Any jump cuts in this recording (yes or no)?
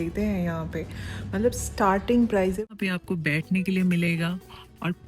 yes